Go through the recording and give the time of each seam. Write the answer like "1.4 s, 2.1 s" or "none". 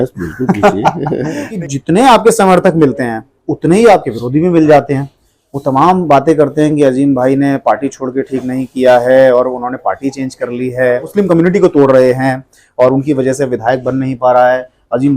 1.4 s, 11.1 s